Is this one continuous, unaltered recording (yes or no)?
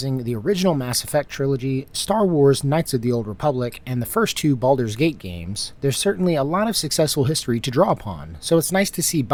yes